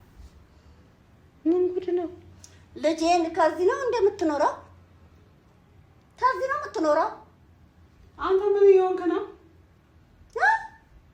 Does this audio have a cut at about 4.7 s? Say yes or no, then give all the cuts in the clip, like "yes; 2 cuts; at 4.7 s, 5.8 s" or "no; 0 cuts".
no; 0 cuts